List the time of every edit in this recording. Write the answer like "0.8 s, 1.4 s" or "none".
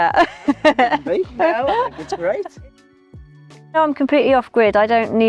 none